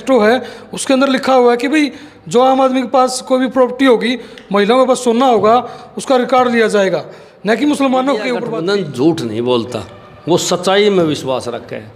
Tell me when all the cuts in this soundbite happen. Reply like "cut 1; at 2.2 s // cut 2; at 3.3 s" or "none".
cut 1; at 8.4 s